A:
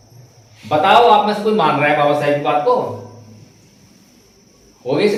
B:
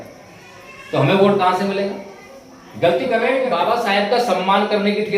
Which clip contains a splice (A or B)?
B